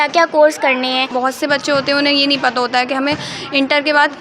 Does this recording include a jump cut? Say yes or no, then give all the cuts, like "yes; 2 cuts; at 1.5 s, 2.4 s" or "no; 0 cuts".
yes; 1 cut; at 1.1 s